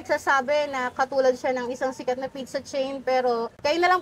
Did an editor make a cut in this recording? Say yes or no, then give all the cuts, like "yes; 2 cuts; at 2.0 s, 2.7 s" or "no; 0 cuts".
no; 0 cuts